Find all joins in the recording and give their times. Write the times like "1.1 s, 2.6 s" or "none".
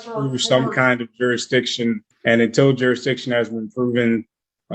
2.1 s